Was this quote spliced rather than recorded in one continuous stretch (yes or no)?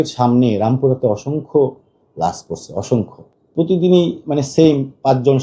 yes